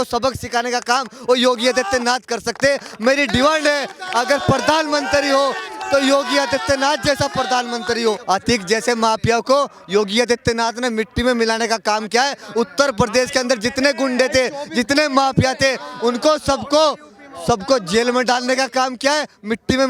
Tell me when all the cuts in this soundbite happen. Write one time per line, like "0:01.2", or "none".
0:08.2